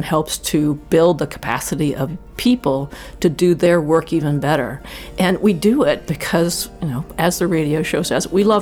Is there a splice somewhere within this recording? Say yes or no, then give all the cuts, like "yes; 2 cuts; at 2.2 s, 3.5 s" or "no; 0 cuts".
yes; 1 cut; at 2.1 s